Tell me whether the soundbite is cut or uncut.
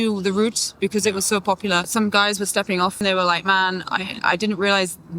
cut